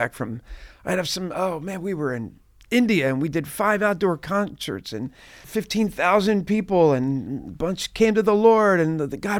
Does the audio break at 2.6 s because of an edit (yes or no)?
no